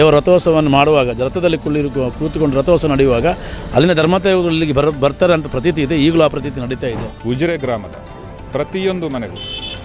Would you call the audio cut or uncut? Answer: cut